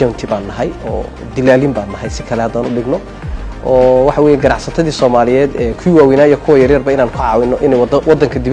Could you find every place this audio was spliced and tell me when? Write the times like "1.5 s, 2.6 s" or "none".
none